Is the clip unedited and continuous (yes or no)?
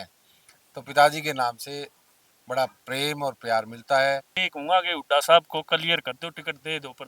no